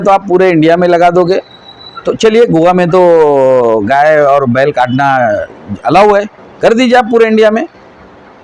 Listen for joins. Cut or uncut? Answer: uncut